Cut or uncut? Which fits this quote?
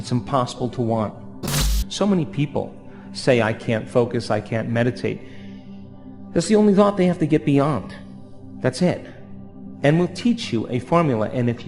cut